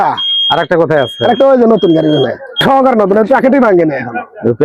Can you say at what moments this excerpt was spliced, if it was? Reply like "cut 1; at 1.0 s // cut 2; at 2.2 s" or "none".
cut 1; at 2.6 s